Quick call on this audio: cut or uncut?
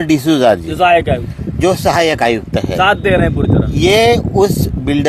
uncut